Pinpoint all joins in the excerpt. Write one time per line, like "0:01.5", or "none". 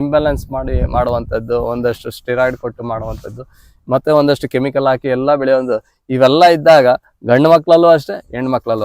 none